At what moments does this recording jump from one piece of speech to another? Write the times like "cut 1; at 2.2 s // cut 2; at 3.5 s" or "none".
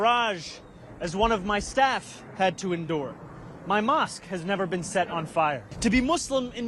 cut 1; at 5.7 s

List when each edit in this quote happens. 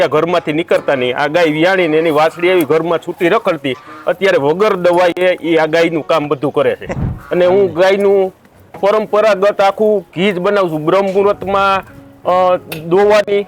cut 1; at 6.9 s

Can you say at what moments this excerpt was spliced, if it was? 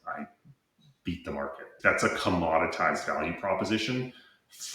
cut 1; at 1.7 s

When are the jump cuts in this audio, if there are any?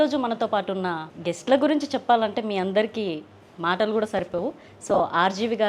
cut 1; at 1.1 s

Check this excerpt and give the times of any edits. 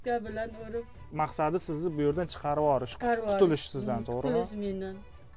cut 1; at 1.1 s

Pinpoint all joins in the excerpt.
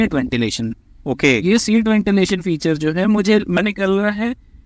cut 1; at 3.6 s

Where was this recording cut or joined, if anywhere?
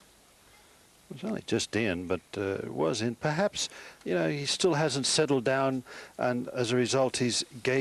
cut 1; at 5.1 s

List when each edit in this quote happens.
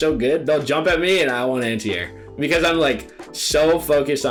none

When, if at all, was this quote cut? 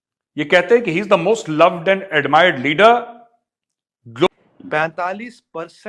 cut 1; at 4.3 s

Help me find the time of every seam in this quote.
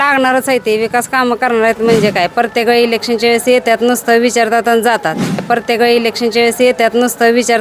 none

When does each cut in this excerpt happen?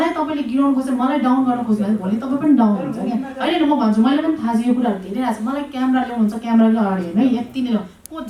none

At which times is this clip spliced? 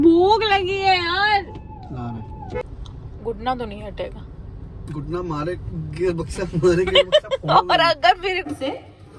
cut 1; at 2.6 s // cut 2; at 8.4 s

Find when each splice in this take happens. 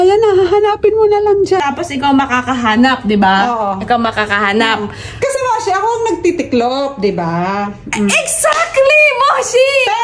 cut 1; at 1.6 s

